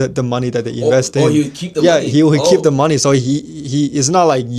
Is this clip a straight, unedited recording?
yes; 0 cuts

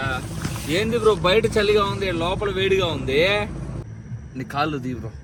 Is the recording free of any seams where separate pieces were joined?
yes; 0 cuts

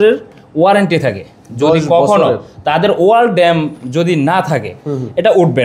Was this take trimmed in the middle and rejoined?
no; 0 cuts

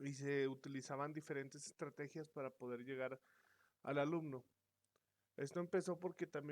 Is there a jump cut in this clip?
yes; 1 cut; at 5.6 s

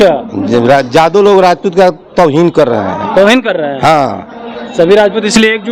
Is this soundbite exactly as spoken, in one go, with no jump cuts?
yes; 0 cuts

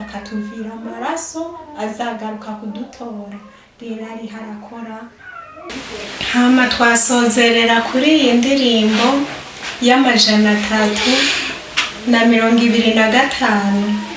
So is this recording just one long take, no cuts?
no; 1 cut; at 5.7 s

